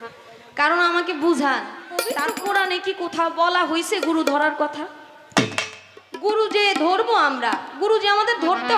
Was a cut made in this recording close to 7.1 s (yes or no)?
no